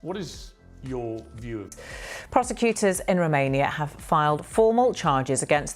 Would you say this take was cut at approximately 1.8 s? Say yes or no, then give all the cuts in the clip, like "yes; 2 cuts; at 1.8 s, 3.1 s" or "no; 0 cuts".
yes; 1 cut; at 1.8 s